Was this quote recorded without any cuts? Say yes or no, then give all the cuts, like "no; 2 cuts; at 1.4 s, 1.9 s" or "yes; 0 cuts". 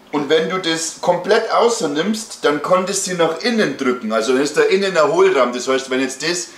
yes; 0 cuts